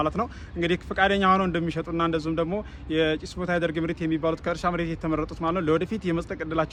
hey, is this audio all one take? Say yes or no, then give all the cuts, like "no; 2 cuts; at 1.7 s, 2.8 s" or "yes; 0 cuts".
yes; 0 cuts